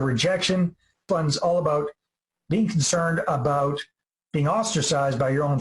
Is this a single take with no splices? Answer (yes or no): no